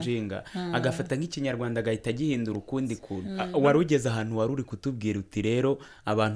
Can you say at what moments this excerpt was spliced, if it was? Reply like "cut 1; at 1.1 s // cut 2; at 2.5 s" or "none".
cut 1; at 3.4 s